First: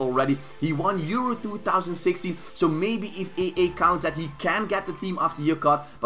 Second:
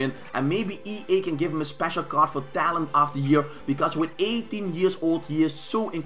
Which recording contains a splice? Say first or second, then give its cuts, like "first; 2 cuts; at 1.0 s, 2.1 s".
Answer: second; 1 cut; at 5.1 s